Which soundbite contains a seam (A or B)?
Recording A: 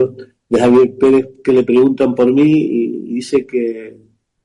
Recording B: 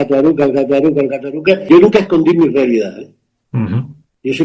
B